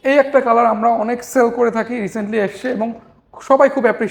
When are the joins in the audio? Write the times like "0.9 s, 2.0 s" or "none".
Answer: none